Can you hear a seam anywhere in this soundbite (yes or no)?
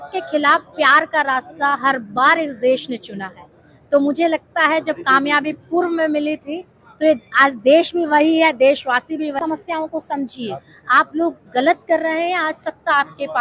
yes